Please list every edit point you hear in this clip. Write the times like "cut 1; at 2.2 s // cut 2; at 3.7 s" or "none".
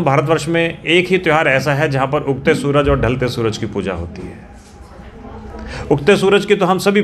none

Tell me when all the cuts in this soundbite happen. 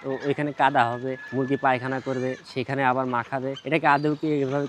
cut 1; at 1.2 s // cut 2; at 3.6 s

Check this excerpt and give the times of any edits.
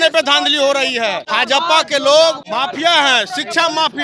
cut 1; at 1.2 s // cut 2; at 2.4 s

